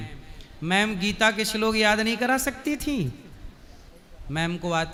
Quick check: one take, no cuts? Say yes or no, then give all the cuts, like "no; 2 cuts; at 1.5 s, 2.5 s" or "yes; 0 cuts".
yes; 0 cuts